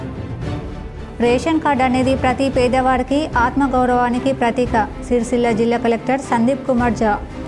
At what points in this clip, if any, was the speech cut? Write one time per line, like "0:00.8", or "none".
0:00.9